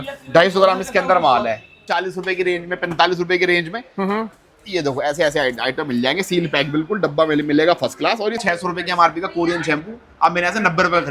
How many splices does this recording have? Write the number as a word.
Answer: two